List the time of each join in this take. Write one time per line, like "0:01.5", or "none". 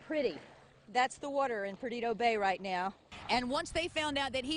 0:03.1